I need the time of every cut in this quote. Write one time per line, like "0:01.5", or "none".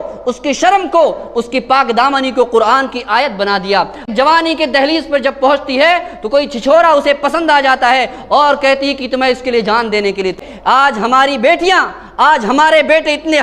0:04.0
0:10.4